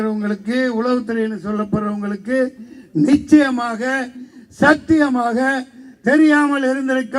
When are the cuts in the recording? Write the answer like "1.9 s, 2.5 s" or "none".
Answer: none